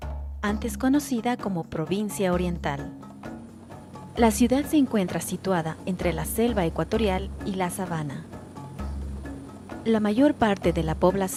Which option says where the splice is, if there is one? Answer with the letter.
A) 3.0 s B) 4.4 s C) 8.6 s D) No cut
D